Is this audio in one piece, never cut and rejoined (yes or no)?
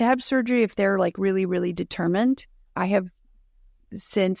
yes